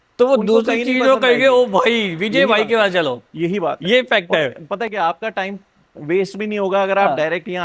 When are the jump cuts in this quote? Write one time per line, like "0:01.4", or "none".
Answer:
none